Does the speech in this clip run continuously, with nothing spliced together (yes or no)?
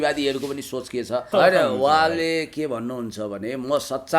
no